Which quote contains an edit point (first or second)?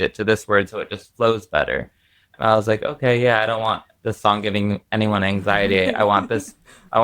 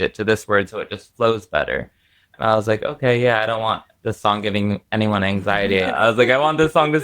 second